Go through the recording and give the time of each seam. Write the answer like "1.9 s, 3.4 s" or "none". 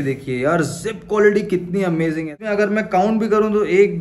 2.3 s